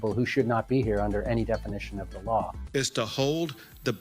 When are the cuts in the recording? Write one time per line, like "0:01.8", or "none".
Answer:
0:02.5